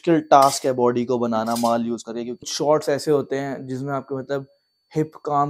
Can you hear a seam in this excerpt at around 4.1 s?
no; 1 cut; at 2.4 s

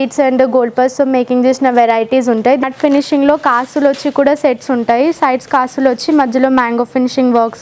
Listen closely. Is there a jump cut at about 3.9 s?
no; 1 cut; at 2.6 s

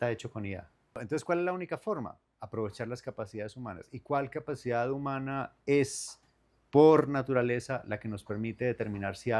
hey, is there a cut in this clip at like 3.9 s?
no; 1 cut; at 1.0 s

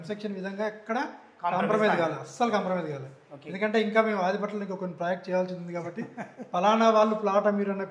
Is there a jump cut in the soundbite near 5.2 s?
no; 0 cuts

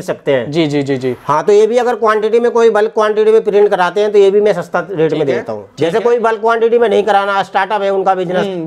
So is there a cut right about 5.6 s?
yes; 1 cut; at 5.6 s

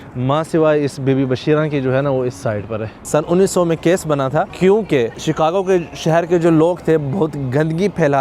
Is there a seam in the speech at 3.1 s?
yes; 3 cuts; at 3.1 s, 4.5 s, 5.2 s

